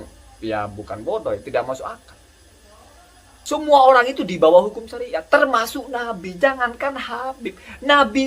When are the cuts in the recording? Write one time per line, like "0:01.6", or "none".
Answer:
0:03.4